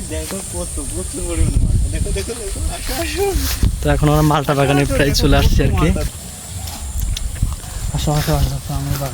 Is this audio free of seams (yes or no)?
no